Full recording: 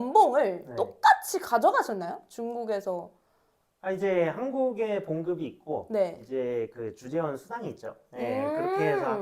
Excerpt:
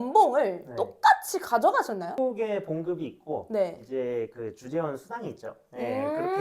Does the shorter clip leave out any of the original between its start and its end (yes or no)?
yes